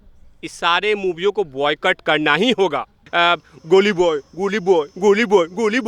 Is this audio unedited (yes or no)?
no